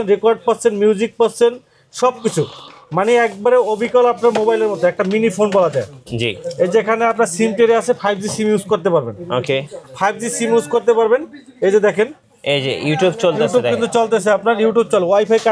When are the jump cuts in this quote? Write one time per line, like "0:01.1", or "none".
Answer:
none

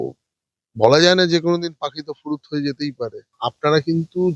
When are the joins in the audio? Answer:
0:03.3

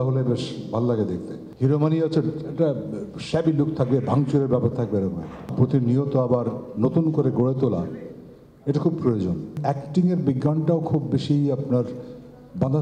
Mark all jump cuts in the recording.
0:01.4
0:05.5
0:09.5

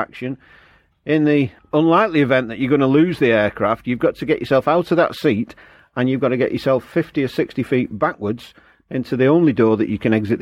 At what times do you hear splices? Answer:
0:01.6

